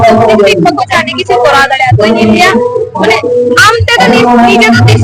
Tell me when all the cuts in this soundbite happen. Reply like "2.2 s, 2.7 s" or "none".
none